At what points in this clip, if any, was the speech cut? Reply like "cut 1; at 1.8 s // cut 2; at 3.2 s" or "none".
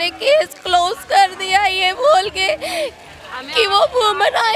none